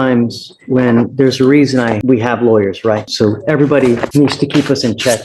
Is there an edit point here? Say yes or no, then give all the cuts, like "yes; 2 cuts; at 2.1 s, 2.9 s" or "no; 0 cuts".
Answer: yes; 3 cuts; at 2.0 s, 3.1 s, 4.1 s